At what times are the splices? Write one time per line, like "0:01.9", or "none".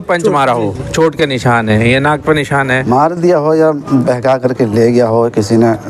0:02.8